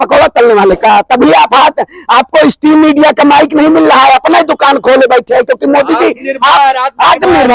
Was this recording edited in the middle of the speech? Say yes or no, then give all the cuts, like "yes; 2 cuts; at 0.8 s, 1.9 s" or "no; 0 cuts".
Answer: no; 0 cuts